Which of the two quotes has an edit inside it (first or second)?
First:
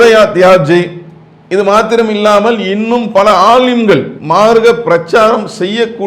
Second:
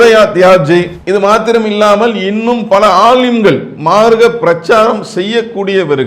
second